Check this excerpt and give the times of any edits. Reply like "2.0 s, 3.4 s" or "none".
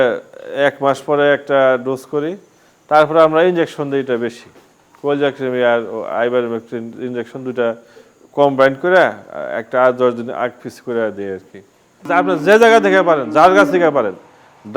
12.0 s

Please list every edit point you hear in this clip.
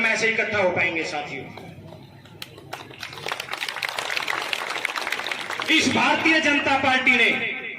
none

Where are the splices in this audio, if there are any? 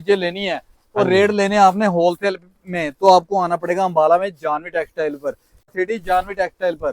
5.7 s

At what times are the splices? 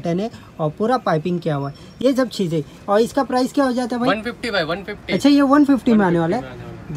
none

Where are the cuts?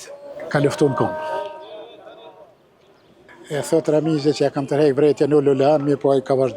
none

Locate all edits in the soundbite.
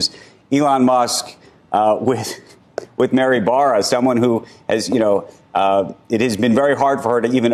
none

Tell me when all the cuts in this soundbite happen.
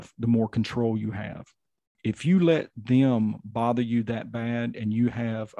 2.0 s

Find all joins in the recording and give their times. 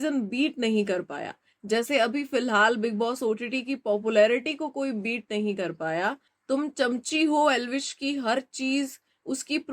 6.3 s

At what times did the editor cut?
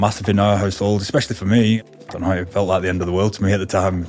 1.8 s

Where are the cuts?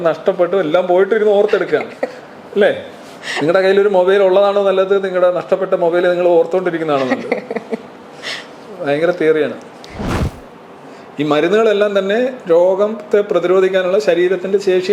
10.0 s

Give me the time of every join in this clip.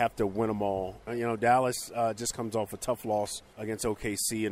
1.0 s, 3.5 s

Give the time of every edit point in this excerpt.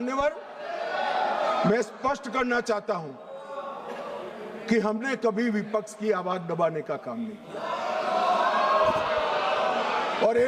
none

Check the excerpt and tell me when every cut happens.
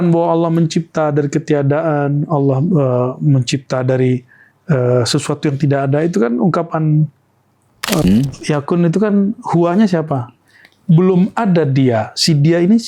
8.0 s

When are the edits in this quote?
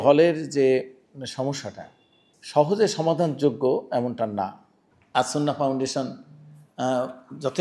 none

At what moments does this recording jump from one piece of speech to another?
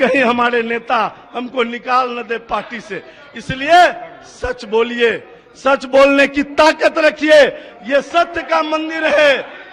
none

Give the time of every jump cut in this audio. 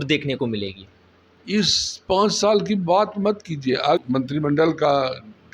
4.0 s

